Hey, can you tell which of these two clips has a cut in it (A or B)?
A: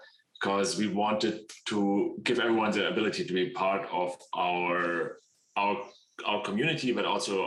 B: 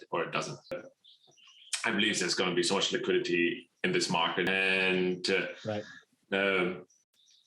B